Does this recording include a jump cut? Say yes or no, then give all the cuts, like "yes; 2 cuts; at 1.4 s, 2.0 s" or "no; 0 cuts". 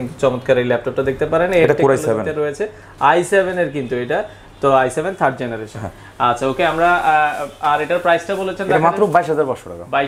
no; 0 cuts